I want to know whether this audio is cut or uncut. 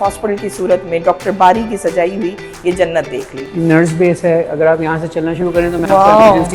cut